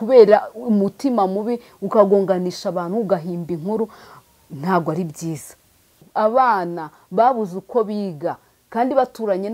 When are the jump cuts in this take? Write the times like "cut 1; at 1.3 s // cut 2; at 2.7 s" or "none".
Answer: cut 1; at 6.1 s